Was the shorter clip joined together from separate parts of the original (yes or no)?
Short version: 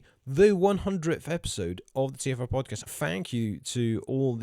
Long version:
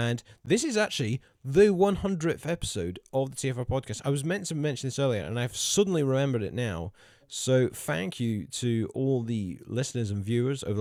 yes